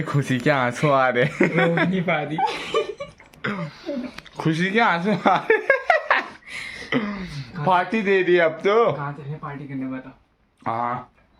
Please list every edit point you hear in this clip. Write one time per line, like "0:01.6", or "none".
none